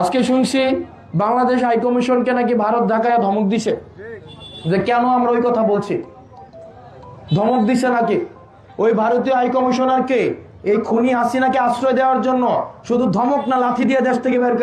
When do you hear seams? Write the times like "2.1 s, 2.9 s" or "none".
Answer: none